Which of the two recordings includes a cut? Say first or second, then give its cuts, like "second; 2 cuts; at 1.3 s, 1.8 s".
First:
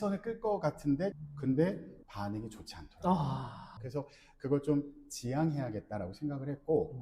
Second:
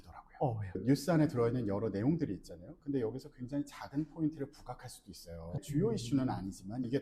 first; 2 cuts; at 1.3 s, 3.8 s